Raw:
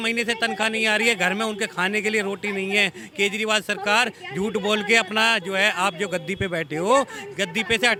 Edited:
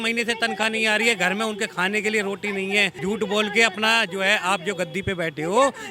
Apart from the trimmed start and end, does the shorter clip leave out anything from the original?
yes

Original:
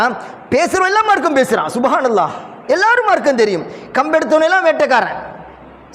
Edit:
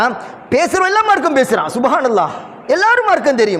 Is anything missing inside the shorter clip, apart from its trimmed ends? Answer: no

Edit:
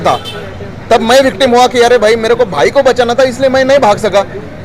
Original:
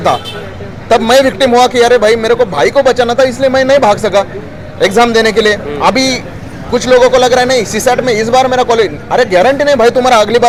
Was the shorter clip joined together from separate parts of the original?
no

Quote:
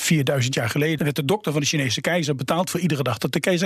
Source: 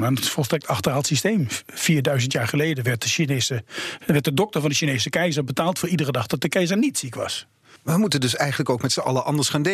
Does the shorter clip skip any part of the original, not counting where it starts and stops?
yes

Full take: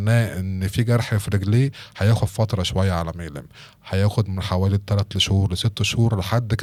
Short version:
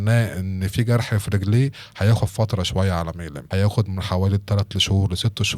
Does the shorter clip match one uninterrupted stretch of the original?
no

